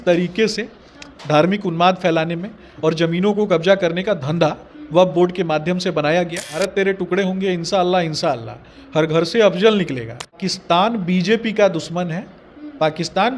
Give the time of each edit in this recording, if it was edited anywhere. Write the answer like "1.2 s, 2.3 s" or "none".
6.4 s, 10.3 s